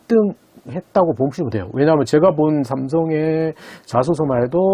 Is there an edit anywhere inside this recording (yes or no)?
no